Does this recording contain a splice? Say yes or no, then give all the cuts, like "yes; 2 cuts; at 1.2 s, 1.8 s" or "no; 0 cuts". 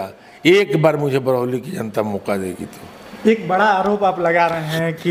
no; 0 cuts